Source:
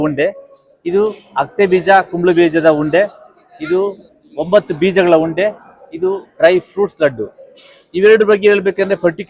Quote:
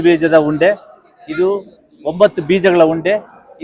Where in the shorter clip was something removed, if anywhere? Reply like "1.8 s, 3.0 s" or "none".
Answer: none